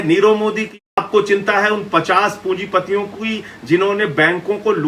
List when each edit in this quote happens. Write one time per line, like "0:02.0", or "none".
0:01.0